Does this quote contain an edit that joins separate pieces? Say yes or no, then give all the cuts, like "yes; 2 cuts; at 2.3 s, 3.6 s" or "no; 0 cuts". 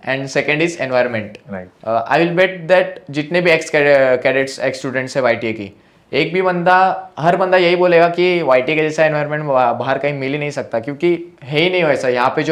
no; 0 cuts